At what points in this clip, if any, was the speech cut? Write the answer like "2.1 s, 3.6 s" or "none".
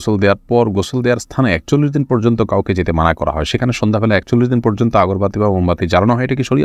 none